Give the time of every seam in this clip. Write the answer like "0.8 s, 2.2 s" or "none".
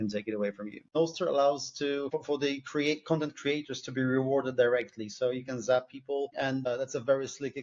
0.9 s, 2.1 s, 6.7 s